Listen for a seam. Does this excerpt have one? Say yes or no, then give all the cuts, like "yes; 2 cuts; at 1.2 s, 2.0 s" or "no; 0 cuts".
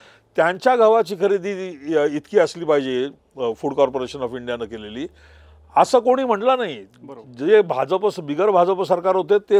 no; 0 cuts